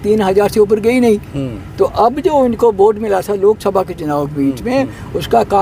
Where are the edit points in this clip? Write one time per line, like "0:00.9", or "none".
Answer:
none